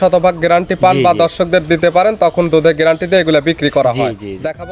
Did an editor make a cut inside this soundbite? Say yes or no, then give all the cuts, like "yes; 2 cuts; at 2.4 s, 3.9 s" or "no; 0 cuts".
no; 0 cuts